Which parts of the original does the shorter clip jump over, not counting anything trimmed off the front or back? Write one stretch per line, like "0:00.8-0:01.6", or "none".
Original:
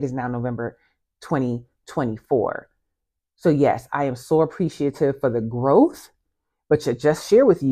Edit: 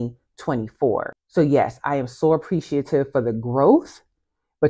0:02.7-0:03.3

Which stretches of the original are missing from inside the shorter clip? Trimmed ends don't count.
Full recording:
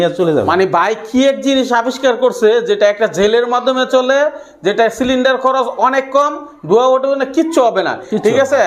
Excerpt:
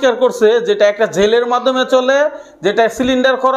none

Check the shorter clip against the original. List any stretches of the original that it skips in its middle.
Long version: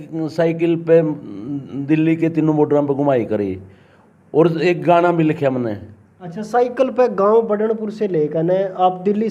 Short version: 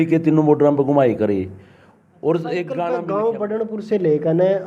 0:05.1-0:07.1

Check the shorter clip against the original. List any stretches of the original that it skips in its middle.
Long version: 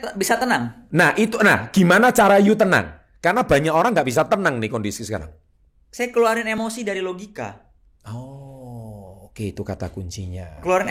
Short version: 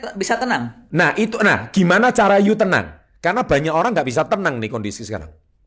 none

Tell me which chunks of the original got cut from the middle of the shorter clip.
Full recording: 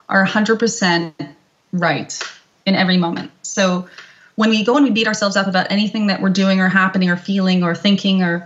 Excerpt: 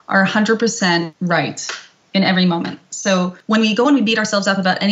0:01.1-0:01.6
0:03.9-0:04.3

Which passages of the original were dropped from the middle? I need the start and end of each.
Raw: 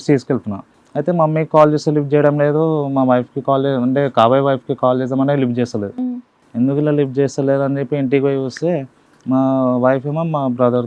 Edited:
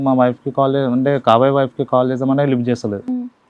none

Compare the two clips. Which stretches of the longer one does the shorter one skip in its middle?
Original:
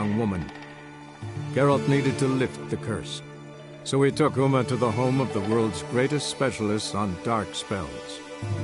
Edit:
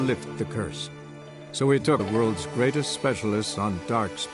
0:04.3-0:05.4

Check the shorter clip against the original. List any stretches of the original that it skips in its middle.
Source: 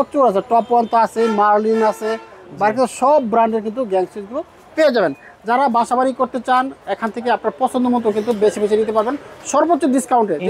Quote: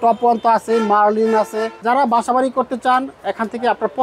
0:02.2-0:05.3

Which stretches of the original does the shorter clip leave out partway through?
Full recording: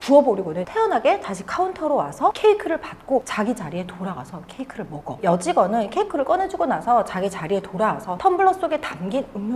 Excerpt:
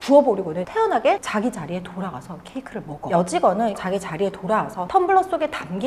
0:01.3-0:03.3
0:05.1-0:05.2
0:05.9-0:07.1

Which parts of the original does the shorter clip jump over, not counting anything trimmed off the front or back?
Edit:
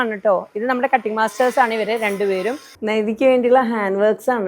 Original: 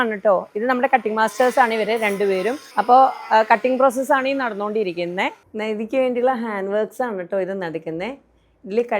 0:02.7-0:05.4

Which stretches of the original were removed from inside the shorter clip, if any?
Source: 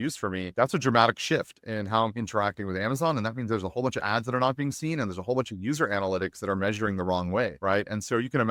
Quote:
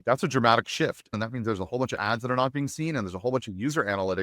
0:01.6-0:03.2

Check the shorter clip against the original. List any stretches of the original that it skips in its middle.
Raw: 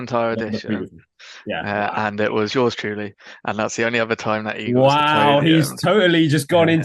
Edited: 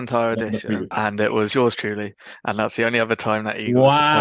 0:00.9-0:01.9

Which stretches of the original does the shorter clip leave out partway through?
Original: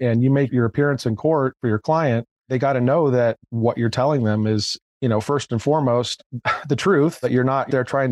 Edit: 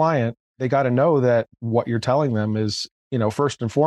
none

